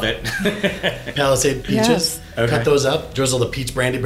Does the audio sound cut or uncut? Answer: cut